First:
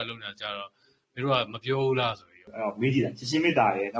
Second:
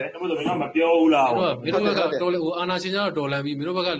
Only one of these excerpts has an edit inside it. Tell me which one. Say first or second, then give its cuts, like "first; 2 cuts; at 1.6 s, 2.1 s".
first; 1 cut; at 2.4 s